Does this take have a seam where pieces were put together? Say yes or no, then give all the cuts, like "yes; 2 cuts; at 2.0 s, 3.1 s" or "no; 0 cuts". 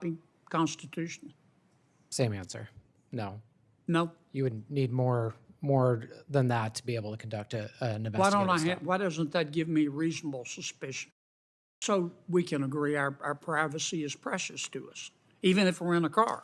yes; 1 cut; at 11.8 s